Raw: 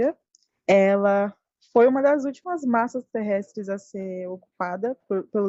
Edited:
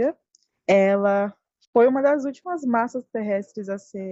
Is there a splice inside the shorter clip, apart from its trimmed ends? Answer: no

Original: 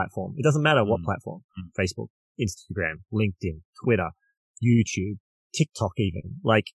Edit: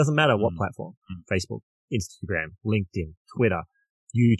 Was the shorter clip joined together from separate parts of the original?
no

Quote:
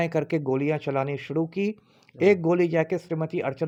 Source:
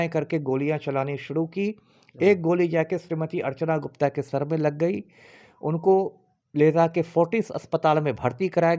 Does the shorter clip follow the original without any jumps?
yes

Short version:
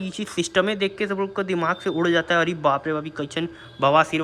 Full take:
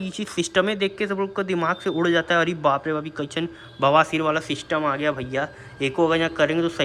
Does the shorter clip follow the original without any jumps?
yes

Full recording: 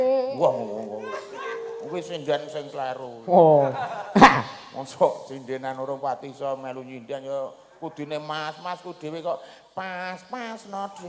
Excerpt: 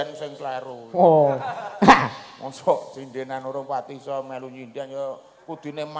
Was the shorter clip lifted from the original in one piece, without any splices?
yes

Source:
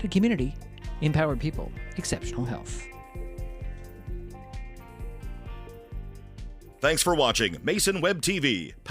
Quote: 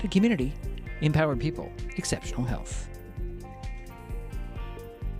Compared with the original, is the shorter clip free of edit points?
no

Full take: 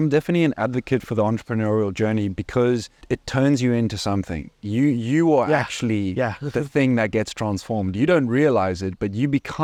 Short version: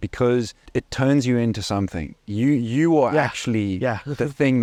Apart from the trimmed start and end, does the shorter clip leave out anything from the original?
no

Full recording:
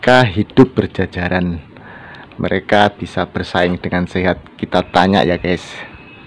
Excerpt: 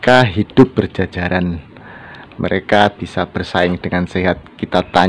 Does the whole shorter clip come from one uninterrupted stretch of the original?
yes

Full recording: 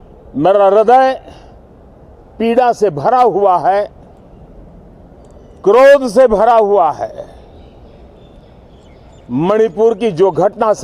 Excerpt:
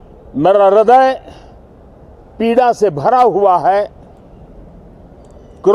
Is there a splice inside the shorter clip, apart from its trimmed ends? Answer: no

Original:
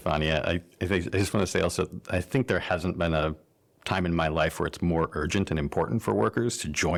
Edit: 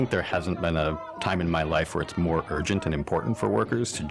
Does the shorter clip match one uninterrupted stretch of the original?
no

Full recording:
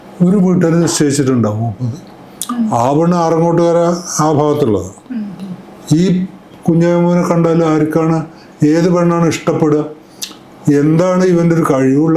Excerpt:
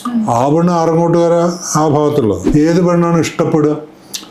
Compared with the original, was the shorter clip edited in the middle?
yes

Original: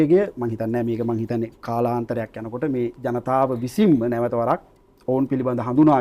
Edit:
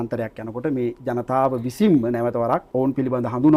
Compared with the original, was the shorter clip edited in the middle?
yes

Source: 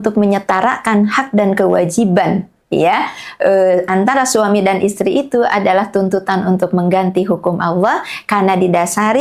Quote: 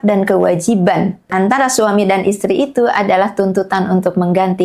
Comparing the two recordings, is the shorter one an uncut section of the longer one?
no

